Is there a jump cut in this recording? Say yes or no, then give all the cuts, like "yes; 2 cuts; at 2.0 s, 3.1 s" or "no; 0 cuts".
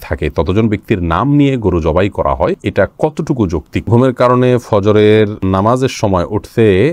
yes; 3 cuts; at 2.6 s, 3.9 s, 5.4 s